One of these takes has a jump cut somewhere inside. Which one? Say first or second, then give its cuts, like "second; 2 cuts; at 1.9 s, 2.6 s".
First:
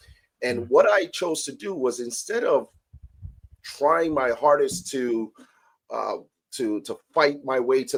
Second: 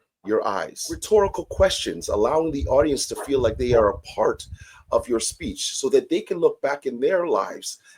second; 1 cut; at 1.0 s